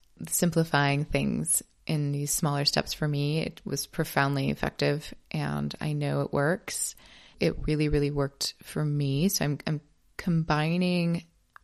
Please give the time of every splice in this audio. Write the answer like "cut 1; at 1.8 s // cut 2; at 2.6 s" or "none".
none

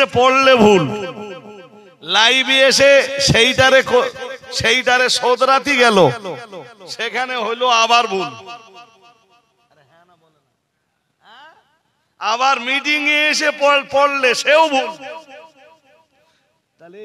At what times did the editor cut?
none

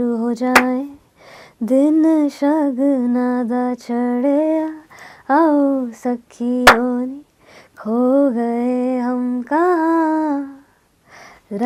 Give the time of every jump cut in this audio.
none

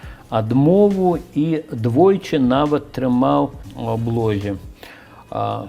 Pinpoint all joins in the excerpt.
cut 1; at 3.7 s

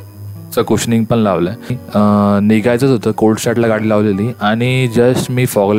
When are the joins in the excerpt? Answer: cut 1; at 1.8 s

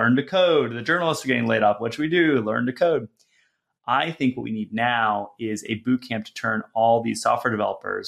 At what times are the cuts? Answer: none

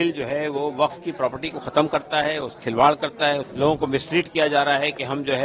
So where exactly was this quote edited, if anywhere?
cut 1; at 3.5 s

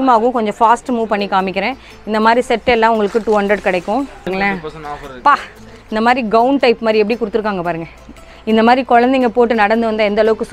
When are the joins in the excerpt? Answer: cut 1; at 4.3 s

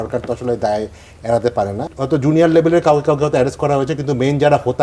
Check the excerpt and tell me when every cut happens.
cut 1; at 1.9 s

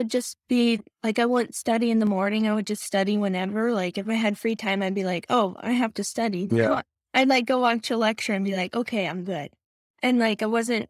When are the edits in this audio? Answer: none

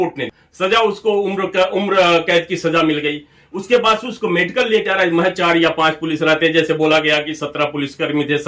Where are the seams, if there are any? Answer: none

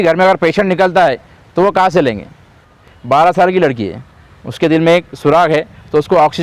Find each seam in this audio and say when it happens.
cut 1; at 2.8 s

